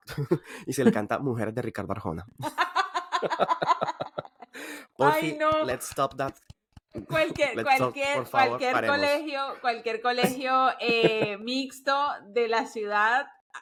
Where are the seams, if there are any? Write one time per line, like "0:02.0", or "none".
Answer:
none